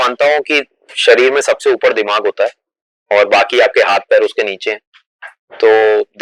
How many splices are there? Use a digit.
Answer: 0